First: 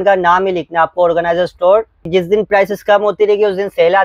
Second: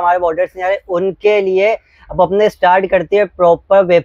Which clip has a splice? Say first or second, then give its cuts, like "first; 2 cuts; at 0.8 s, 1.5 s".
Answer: first; 1 cut; at 2.1 s